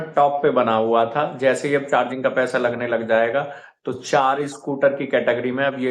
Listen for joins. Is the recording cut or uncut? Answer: uncut